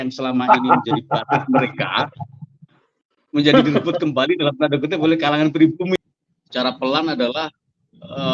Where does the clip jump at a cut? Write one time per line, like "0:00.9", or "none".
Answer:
0:05.9

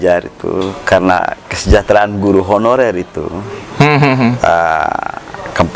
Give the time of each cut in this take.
none

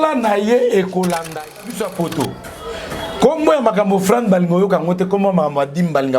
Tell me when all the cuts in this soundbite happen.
0:01.6

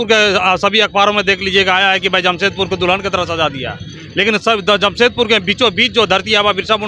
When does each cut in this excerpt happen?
none

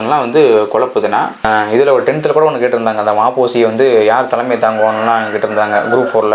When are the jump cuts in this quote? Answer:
0:01.4

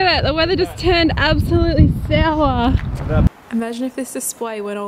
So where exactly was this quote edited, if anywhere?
0:03.3

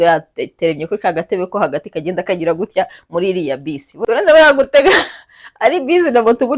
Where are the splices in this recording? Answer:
0:03.9

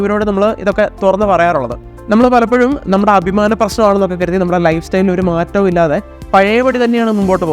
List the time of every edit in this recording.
0:01.8

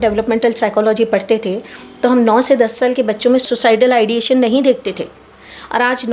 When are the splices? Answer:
0:03.4

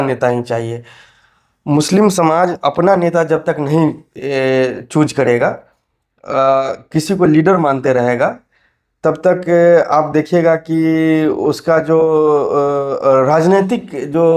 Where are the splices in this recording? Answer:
none

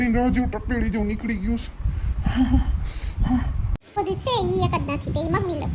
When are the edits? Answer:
0:04.0

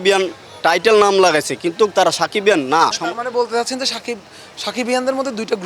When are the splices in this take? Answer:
0:03.0

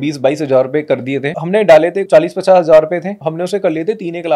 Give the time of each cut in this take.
0:01.3
0:02.0
0:03.2

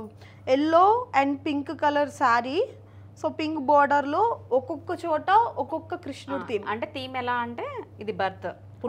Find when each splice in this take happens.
none

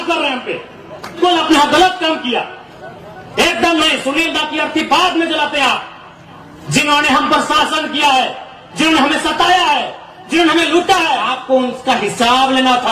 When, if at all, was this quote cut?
0:01.2
0:11.3

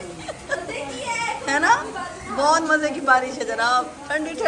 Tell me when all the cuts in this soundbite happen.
none

